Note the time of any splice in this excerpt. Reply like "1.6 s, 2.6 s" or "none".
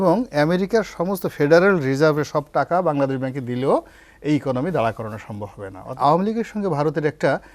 5.9 s